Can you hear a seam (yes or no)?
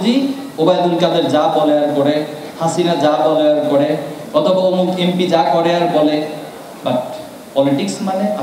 no